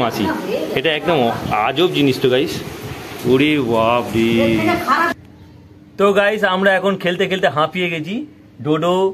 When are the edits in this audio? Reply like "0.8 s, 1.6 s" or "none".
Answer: 5.1 s